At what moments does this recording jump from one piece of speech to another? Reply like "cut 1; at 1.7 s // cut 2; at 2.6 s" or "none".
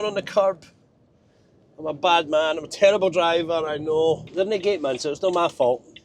cut 1; at 4.3 s